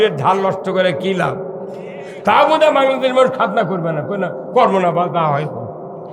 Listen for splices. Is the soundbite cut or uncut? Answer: uncut